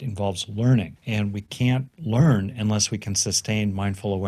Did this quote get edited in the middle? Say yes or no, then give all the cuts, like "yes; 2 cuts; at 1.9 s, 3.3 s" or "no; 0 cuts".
yes; 2 cuts; at 1.0 s, 1.9 s